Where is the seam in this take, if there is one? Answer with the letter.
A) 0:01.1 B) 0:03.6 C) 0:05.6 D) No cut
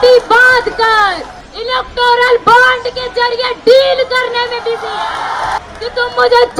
C